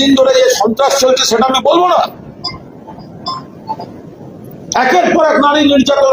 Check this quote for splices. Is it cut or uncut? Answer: uncut